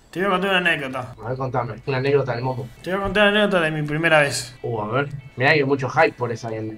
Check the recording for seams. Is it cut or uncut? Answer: uncut